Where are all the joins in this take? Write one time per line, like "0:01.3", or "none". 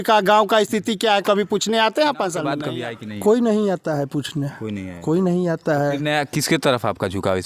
0:02.6